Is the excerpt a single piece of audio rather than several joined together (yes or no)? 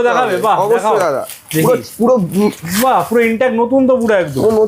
yes